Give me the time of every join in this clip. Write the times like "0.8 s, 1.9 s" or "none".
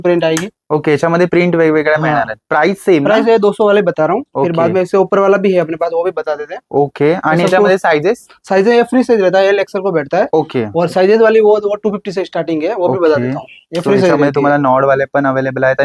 none